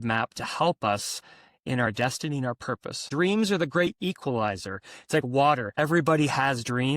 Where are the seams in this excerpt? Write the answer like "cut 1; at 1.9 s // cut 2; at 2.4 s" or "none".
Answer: cut 1; at 3.1 s // cut 2; at 5.7 s